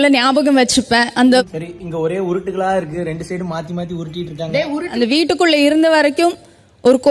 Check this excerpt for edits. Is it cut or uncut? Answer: cut